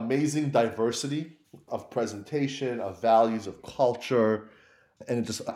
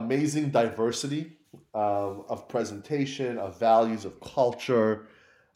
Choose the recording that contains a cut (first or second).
first